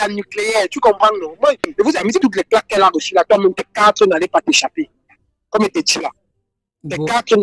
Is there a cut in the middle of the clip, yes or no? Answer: yes